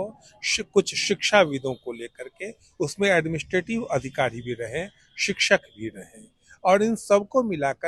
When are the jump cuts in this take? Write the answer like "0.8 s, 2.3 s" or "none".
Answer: none